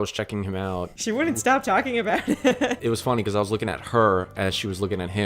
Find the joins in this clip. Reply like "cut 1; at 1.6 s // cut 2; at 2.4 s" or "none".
cut 1; at 0.9 s // cut 2; at 2.8 s